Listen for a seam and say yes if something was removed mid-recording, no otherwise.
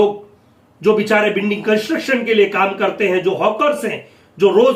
no